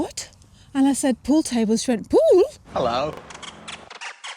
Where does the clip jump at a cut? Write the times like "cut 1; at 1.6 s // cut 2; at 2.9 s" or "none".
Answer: cut 1; at 2.6 s